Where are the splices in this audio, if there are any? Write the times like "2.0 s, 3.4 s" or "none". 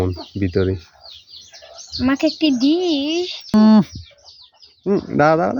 3.5 s